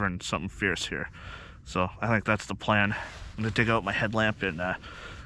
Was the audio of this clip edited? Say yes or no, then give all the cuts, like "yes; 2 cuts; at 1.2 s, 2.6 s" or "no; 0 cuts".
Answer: no; 0 cuts